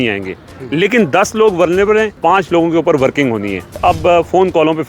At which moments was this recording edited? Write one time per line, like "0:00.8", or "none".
0:02.2
0:03.7